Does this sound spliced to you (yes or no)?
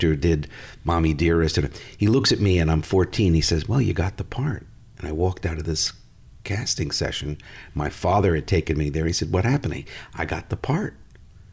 no